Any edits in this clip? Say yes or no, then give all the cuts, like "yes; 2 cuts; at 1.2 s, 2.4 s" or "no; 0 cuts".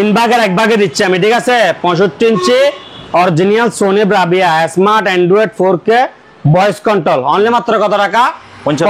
no; 0 cuts